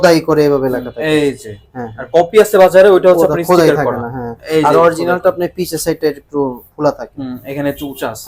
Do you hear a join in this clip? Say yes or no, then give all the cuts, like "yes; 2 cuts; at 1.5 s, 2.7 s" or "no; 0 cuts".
no; 0 cuts